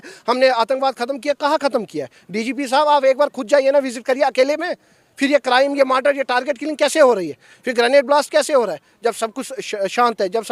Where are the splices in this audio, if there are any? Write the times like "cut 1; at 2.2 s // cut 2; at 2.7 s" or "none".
none